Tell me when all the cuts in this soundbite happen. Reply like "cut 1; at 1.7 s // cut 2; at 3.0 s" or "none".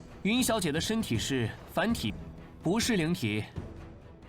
cut 1; at 2.1 s